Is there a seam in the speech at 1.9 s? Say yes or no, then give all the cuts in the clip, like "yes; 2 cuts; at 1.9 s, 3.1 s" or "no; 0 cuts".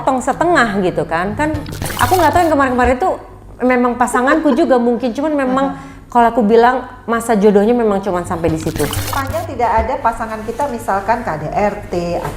yes; 2 cuts; at 1.9 s, 9.1 s